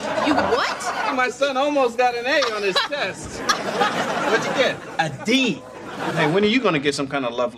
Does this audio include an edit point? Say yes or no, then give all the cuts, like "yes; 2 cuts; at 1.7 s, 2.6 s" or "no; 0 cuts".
yes; 1 cut; at 6.0 s